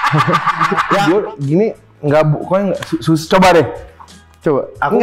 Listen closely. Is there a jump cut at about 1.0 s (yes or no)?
yes